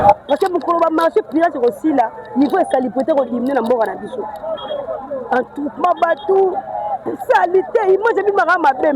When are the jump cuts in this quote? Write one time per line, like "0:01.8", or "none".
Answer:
none